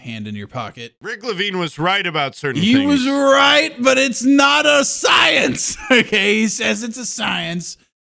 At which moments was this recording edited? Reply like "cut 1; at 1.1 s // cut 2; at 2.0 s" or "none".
cut 1; at 1.0 s